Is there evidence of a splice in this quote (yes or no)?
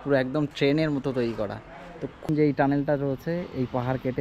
yes